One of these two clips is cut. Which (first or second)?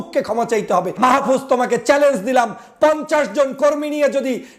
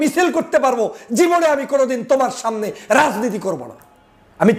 first